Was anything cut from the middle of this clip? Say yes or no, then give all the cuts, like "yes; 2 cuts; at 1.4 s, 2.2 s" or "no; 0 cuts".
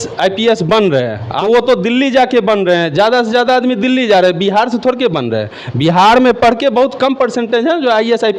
yes; 1 cut; at 1.3 s